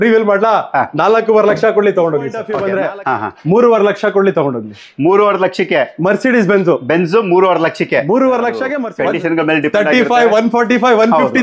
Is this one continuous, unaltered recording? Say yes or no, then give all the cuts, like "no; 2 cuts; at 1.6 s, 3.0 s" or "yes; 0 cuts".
no; 2 cuts; at 2.5 s, 8.8 s